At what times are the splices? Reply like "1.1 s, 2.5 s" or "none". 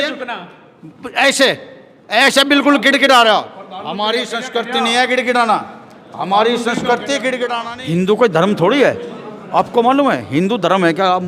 7.7 s